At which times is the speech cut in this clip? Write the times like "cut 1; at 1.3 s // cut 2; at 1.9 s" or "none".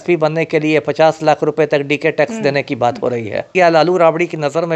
cut 1; at 3.5 s